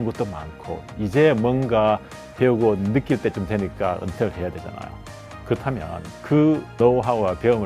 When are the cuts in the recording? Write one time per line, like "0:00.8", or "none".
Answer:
none